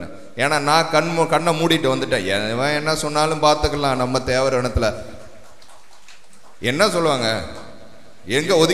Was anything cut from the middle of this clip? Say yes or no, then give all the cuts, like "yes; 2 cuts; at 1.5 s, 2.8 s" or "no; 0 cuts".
no; 0 cuts